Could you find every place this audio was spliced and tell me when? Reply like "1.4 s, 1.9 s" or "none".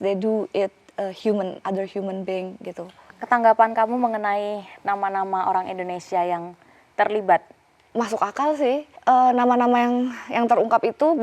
2.9 s, 7.8 s, 8.9 s